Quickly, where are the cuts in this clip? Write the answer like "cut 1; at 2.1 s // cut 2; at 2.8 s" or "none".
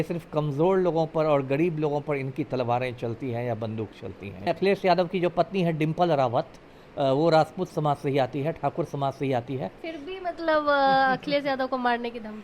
cut 1; at 4.4 s // cut 2; at 9.8 s